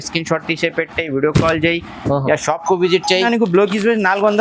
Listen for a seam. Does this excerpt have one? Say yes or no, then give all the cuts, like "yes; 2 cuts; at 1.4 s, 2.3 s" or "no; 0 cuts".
yes; 1 cut; at 3.3 s